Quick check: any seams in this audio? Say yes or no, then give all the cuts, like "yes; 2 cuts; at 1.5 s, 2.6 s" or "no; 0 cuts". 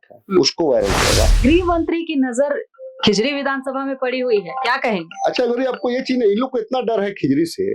yes; 1 cut; at 1.3 s